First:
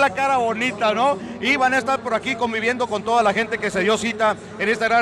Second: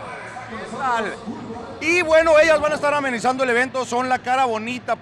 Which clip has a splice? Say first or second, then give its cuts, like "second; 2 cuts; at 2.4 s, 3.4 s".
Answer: second; 1 cut; at 2.4 s